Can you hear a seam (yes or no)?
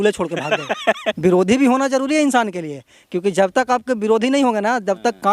yes